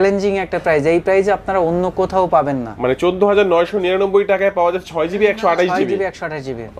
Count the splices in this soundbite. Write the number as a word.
zero